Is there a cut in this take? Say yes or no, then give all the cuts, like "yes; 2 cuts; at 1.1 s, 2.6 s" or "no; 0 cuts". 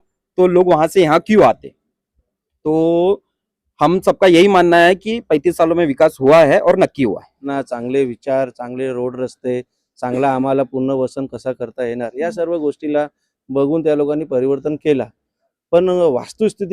yes; 1 cut; at 7.4 s